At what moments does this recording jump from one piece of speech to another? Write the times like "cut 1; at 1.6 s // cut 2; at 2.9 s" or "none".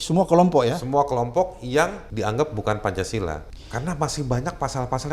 cut 1; at 2.0 s // cut 2; at 3.5 s